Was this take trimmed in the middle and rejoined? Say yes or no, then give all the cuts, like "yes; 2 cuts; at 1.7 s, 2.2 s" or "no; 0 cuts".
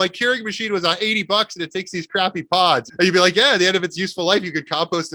no; 0 cuts